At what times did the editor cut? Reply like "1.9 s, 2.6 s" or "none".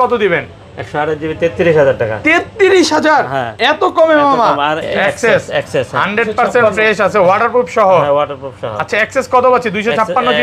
4.8 s